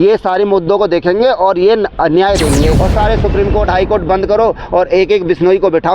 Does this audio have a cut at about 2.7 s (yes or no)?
yes